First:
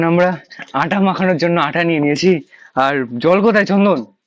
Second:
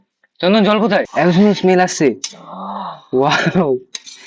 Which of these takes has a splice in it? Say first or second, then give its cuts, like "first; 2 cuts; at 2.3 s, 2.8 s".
second; 1 cut; at 1.1 s